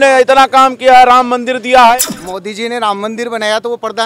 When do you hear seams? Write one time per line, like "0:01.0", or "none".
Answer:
0:02.0